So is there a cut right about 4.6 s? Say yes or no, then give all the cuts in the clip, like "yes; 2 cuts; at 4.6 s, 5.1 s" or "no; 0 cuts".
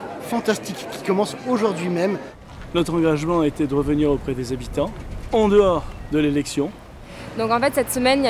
no; 2 cuts; at 2.4 s, 6.9 s